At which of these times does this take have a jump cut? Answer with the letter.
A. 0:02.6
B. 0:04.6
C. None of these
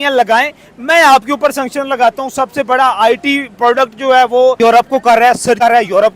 B